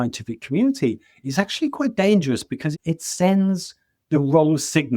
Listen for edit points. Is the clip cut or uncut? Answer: cut